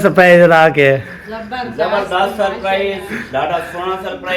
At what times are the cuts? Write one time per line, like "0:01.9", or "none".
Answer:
none